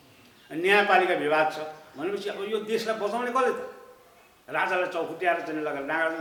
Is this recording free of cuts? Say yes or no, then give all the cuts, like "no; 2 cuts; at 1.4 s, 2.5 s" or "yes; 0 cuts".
yes; 0 cuts